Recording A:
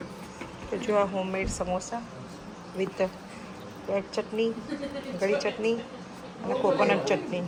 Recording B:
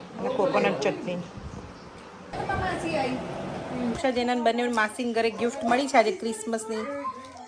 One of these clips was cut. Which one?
B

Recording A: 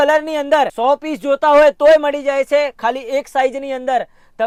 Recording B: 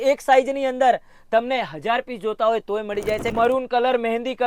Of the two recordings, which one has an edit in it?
B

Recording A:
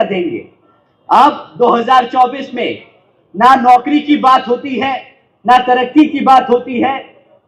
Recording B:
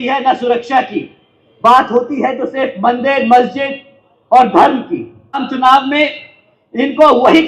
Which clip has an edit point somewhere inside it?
B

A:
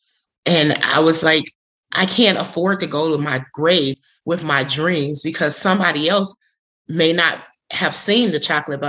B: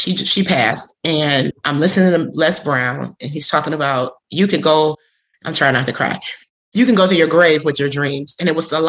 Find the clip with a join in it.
B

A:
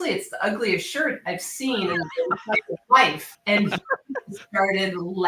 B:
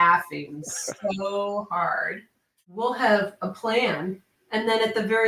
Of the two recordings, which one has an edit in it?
B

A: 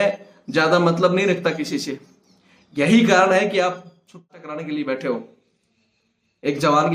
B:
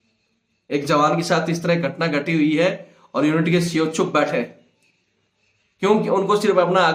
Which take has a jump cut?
A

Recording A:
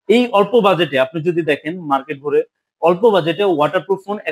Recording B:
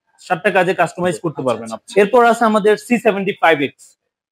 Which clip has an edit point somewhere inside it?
B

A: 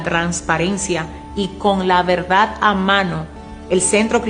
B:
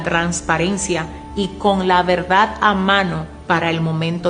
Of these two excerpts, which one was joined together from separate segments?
A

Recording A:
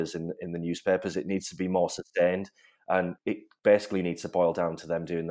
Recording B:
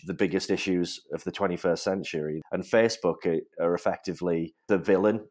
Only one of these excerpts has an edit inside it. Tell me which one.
B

